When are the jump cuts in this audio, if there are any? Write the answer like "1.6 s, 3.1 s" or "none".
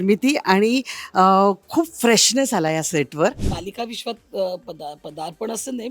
3.6 s